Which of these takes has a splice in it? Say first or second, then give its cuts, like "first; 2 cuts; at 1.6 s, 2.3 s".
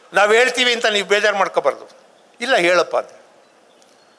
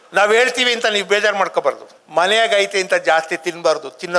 second; 1 cut; at 1.9 s